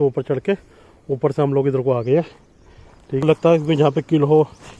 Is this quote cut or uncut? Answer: cut